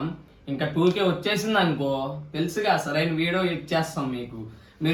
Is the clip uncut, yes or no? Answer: yes